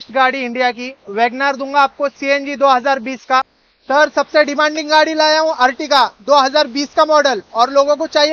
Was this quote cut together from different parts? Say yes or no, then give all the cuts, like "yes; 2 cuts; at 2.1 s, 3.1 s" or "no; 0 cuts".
yes; 1 cut; at 3.5 s